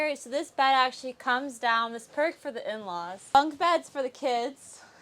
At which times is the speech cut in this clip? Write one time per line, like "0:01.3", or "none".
0:03.3